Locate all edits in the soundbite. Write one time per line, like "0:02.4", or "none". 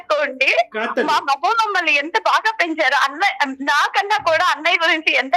none